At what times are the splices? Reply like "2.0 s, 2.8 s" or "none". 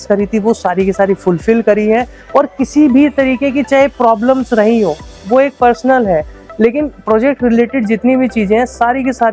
none

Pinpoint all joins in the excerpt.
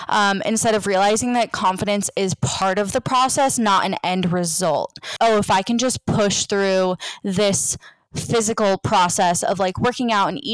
5.1 s

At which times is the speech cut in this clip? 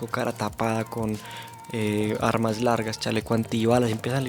none

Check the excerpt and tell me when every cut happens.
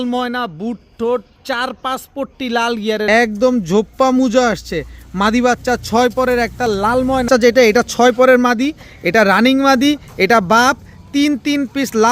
3.0 s, 7.2 s

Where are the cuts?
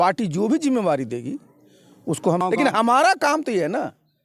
2.4 s

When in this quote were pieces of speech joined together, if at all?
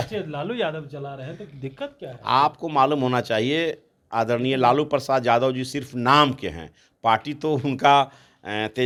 none

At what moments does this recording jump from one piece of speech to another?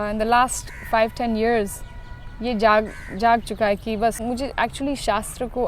4.2 s

